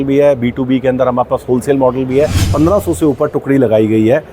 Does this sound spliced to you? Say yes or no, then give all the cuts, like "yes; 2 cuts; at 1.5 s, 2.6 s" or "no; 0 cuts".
yes; 1 cut; at 2.5 s